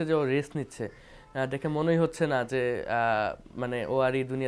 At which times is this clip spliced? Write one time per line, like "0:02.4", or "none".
none